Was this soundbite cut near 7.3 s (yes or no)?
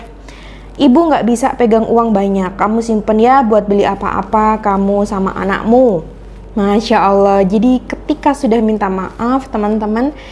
no